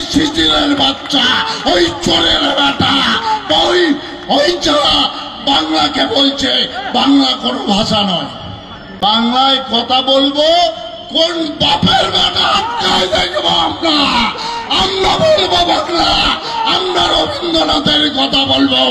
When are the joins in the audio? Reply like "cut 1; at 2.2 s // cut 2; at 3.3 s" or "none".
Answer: cut 1; at 8.8 s